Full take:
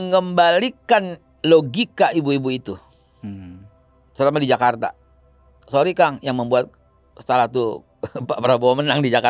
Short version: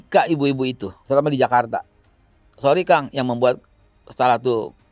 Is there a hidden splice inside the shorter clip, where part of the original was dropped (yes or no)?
yes